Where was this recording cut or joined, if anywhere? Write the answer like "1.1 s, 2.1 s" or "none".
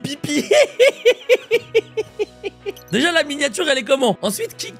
2.8 s